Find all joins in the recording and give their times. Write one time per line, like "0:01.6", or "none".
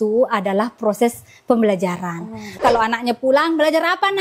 0:02.6